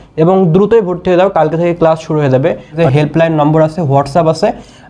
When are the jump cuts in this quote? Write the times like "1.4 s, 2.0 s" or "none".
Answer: 2.7 s